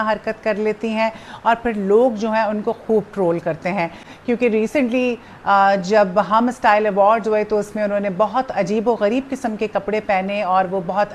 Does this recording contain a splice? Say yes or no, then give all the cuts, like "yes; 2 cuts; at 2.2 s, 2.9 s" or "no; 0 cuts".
no; 0 cuts